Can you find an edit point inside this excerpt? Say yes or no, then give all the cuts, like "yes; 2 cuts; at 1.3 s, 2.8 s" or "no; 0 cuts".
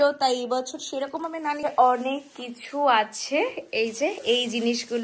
yes; 1 cut; at 1.6 s